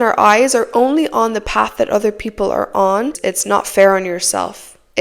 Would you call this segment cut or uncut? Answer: cut